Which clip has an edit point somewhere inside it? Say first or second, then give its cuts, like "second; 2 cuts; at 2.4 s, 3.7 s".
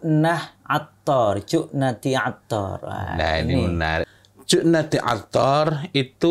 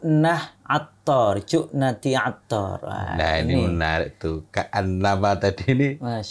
first; 1 cut; at 4.1 s